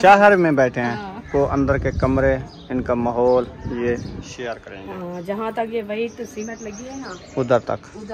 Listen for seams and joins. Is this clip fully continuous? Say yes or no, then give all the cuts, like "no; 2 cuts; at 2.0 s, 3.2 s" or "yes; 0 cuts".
no; 1 cut; at 1.3 s